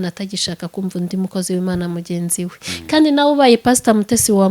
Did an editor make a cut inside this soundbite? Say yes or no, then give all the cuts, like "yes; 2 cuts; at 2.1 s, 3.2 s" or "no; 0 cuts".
no; 0 cuts